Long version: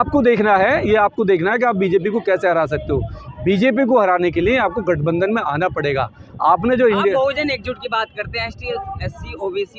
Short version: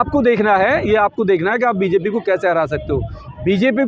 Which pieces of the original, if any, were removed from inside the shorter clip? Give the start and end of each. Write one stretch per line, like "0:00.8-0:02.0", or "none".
none